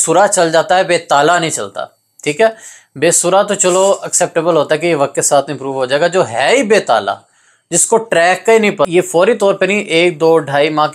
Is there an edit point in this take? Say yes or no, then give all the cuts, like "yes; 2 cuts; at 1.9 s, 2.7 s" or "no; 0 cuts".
yes; 1 cut; at 8.9 s